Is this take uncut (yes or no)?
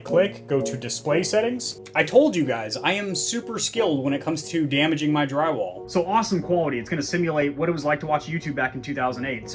no